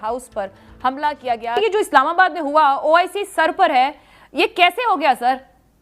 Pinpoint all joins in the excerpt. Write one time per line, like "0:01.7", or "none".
0:01.6

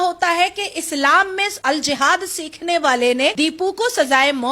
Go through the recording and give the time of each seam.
0:01.5
0:03.3

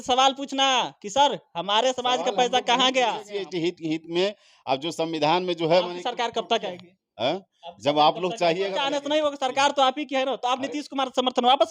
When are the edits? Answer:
0:03.3
0:08.8

